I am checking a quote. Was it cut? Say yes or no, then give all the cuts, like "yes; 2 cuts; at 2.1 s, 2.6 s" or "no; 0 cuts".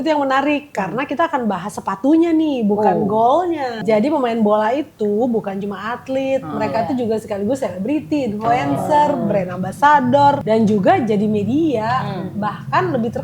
yes; 2 cuts; at 3.8 s, 10.4 s